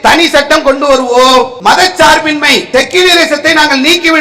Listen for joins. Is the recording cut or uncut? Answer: cut